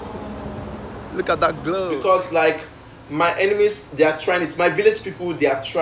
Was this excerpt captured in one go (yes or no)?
no